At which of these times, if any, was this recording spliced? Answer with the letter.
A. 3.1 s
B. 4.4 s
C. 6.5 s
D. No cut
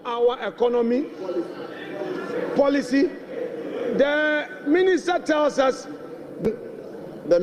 C